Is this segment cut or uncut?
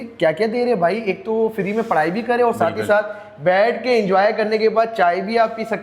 uncut